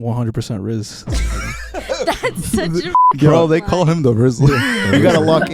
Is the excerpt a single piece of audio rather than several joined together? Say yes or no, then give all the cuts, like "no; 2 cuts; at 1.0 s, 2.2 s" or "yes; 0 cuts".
yes; 0 cuts